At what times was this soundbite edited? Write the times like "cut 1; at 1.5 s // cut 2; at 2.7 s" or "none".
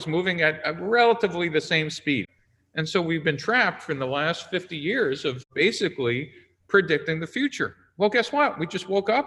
cut 1; at 2.3 s